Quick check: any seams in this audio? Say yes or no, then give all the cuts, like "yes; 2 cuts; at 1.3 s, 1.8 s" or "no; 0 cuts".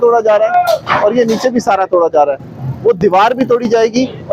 no; 0 cuts